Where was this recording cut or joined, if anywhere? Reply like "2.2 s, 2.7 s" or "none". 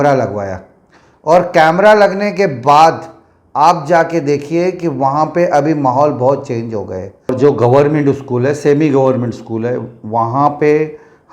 7.3 s

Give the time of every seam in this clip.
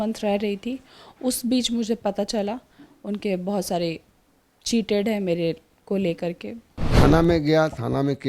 6.8 s

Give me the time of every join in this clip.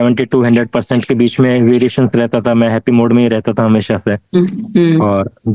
none

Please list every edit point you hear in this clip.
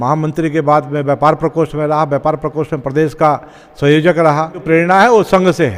4.6 s

